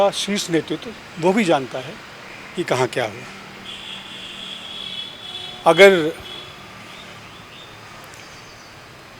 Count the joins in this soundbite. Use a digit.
0